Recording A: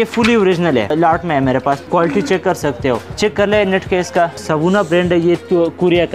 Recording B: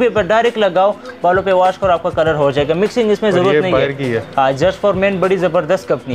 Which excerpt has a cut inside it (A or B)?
A